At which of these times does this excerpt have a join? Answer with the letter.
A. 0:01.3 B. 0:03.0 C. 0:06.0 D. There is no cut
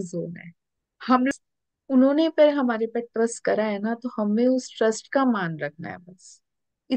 A